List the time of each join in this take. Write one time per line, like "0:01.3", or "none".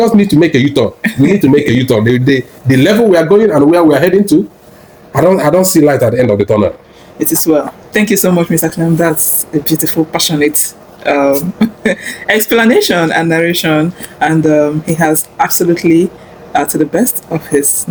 none